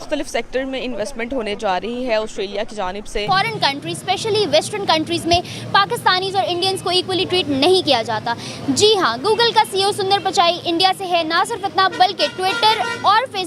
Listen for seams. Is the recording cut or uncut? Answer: cut